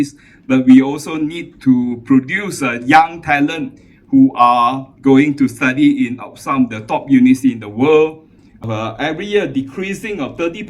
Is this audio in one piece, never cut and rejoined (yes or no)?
no